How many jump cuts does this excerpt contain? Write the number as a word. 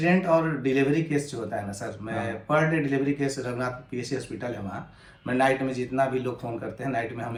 zero